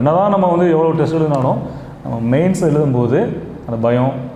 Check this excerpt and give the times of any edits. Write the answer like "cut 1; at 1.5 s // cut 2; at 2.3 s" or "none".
none